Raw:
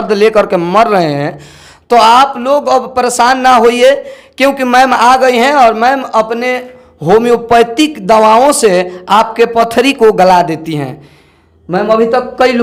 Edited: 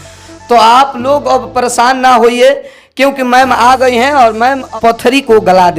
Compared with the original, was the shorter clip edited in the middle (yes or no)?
yes